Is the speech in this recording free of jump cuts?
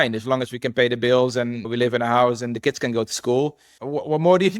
no; 1 cut; at 3.7 s

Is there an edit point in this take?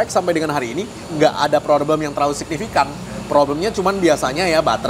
yes; 1 cut; at 1.0 s

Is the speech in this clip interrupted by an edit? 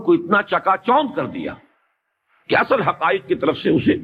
no; 0 cuts

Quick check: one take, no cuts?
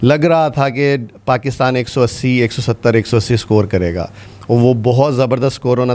yes; 0 cuts

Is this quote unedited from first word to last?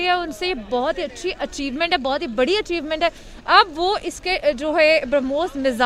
yes; 0 cuts

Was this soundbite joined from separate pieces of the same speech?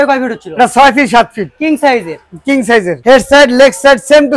yes; 1 cut; at 3.0 s

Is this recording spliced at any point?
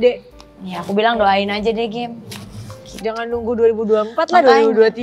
no; 0 cuts

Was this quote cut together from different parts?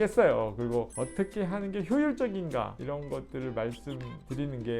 yes; 2 cuts; at 0.9 s, 2.8 s

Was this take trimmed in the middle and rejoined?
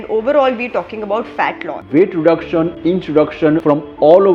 yes; 3 cuts; at 1.7 s, 2.8 s, 3.6 s

